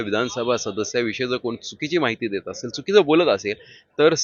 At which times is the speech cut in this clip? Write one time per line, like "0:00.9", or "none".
none

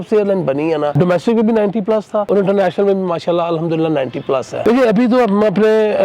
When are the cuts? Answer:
0:00.9
0:02.2
0:04.7

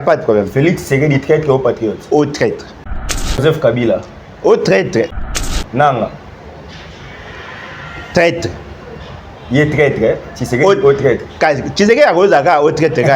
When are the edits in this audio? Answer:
0:03.0
0:05.2

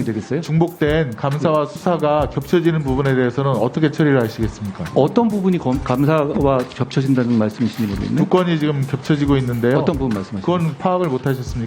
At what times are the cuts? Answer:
none

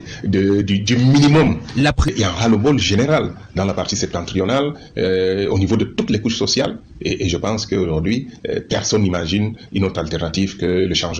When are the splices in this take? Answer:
0:02.1

